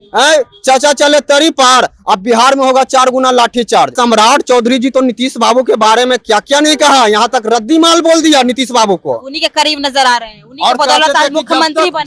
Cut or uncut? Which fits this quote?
cut